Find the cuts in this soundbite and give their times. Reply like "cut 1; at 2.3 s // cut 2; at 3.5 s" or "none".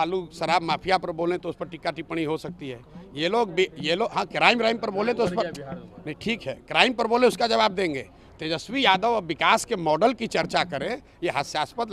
none